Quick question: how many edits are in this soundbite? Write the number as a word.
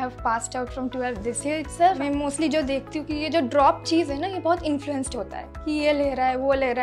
one